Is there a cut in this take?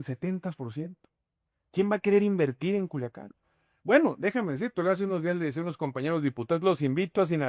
no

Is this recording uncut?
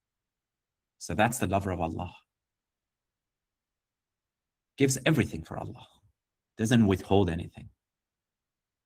yes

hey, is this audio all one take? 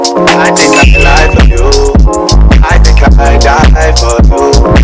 yes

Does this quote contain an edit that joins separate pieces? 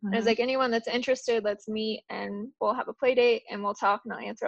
no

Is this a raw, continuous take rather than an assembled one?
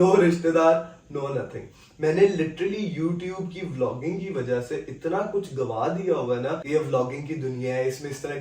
no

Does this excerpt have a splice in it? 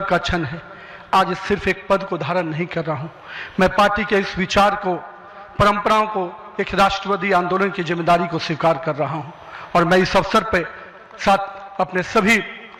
no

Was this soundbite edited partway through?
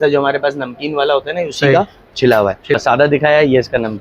yes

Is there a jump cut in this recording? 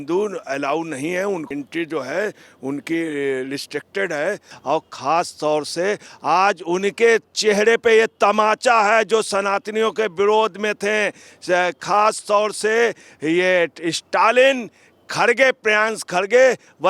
yes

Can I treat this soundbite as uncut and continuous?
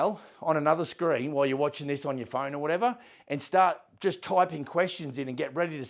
yes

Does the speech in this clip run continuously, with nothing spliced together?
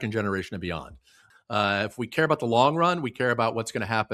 no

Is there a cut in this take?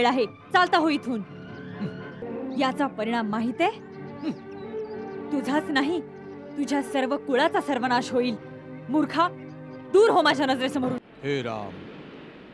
yes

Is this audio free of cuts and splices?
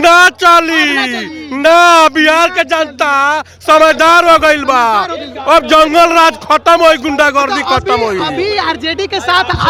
yes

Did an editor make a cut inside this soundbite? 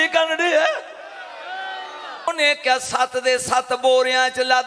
yes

